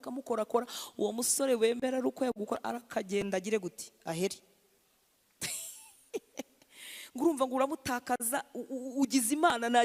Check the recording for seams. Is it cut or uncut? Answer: uncut